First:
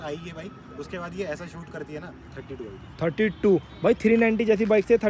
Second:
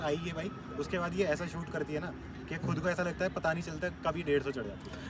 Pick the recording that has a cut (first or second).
first